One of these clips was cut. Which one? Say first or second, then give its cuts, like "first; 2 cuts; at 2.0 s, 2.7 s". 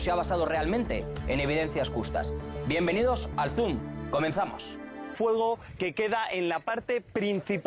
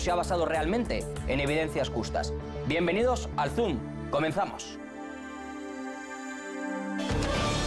second; 1 cut; at 5.2 s